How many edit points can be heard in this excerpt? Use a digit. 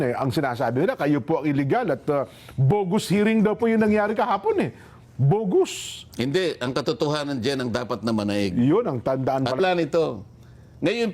1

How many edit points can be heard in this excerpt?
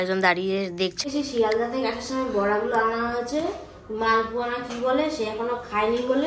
1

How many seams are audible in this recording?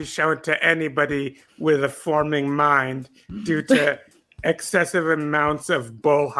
0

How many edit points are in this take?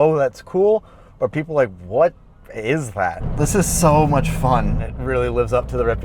1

